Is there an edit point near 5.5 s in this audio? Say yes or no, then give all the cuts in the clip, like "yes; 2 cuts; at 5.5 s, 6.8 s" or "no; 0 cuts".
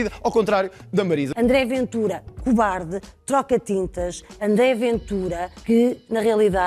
yes; 2 cuts; at 1.3 s, 5.5 s